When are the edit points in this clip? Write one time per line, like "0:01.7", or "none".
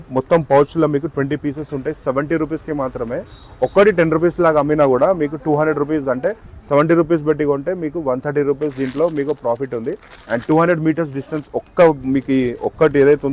none